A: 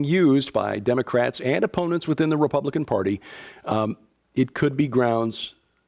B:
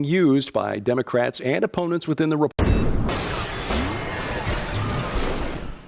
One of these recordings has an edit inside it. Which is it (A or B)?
A